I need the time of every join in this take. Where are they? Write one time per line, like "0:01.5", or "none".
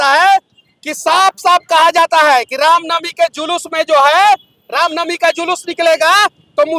none